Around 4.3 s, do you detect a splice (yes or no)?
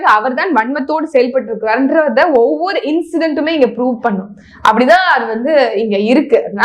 no